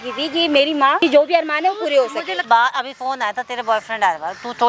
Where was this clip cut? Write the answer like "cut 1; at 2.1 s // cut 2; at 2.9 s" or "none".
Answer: cut 1; at 1.0 s // cut 2; at 2.4 s